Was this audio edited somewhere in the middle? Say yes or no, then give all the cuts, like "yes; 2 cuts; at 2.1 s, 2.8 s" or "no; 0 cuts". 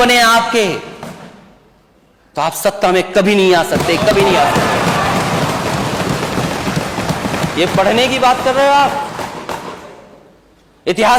no; 0 cuts